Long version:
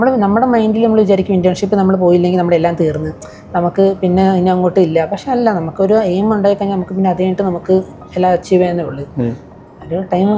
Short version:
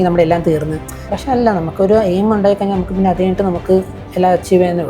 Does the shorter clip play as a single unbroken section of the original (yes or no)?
no